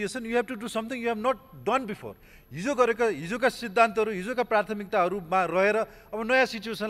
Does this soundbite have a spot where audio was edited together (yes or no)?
no